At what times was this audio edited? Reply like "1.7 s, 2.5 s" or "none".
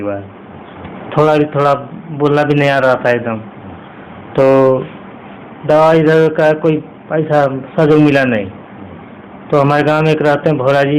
none